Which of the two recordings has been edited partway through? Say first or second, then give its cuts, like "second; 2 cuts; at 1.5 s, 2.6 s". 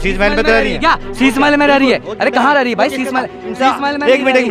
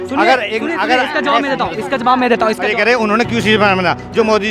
second; 1 cut; at 2.6 s